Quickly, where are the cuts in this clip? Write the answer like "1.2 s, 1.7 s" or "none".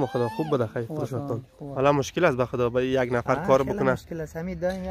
1.6 s